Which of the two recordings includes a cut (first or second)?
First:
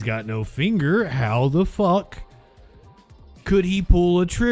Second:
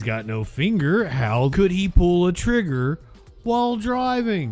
second